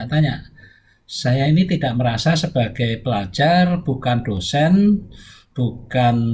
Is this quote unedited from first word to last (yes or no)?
yes